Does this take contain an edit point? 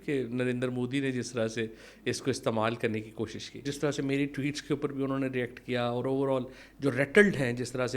yes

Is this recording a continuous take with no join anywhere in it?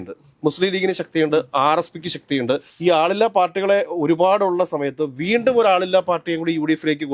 no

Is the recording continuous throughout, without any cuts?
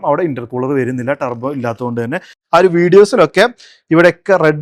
no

